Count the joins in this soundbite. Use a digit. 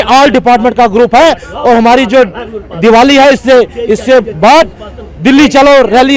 0